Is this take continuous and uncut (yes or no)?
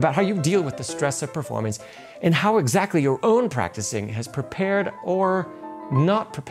yes